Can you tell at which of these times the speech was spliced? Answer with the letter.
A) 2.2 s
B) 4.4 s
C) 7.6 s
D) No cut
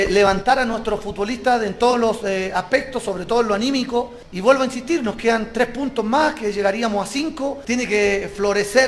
C